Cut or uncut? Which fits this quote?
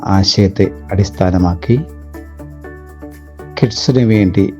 cut